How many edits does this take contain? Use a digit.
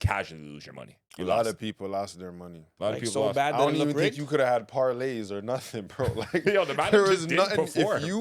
1